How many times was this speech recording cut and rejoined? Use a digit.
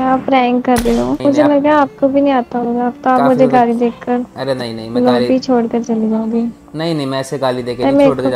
1